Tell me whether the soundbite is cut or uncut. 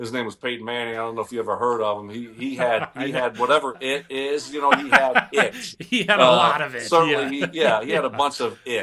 uncut